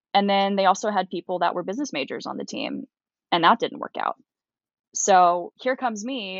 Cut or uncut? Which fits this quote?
uncut